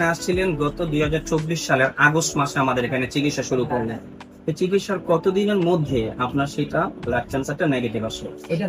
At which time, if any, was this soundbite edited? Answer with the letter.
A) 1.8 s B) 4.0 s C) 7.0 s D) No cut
D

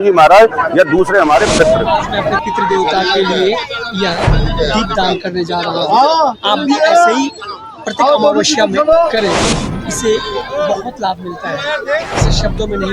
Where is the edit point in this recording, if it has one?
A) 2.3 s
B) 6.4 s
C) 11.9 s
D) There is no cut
A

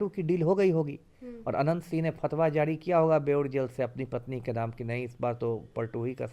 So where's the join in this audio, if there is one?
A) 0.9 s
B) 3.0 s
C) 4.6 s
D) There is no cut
D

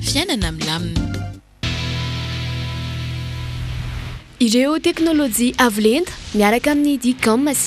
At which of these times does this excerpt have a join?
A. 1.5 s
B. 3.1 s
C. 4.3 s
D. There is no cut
A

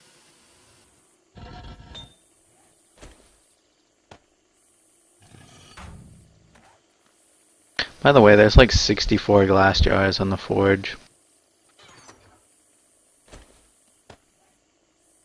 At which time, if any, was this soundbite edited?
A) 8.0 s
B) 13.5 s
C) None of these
C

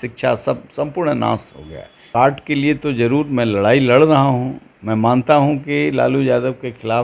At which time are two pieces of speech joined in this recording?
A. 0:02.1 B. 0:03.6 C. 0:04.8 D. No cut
A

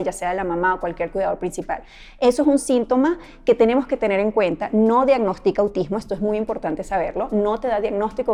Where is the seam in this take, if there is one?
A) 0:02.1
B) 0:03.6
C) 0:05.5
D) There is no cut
D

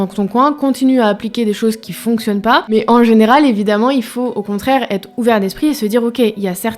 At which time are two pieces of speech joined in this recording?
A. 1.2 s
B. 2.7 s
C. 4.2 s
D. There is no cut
B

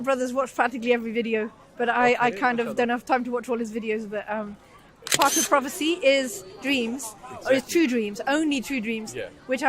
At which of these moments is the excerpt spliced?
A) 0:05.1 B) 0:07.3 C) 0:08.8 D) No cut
A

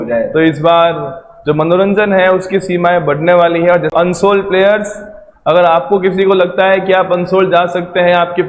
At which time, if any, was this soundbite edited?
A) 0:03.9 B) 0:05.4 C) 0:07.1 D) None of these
A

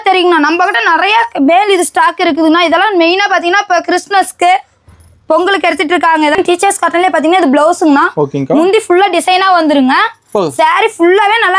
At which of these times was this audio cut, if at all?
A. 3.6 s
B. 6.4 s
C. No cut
B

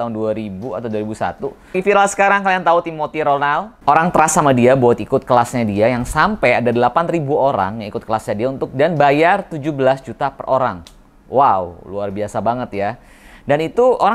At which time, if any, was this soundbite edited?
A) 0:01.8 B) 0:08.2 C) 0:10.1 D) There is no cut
A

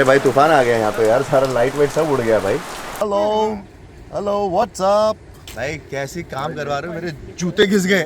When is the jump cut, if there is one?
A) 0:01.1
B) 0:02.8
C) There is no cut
B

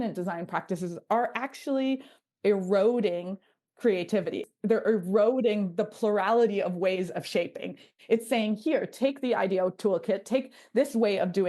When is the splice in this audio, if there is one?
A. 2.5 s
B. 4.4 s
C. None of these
B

